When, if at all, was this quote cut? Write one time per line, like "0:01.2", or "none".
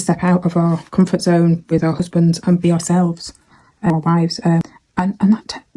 0:03.9
0:04.6